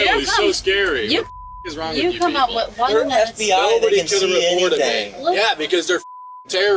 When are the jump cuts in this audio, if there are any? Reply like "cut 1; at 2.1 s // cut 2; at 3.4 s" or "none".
cut 1; at 2.9 s // cut 2; at 5.3 s